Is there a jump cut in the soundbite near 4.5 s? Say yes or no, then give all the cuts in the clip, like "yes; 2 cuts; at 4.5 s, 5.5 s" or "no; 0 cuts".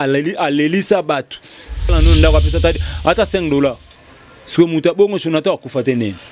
no; 1 cut; at 1.9 s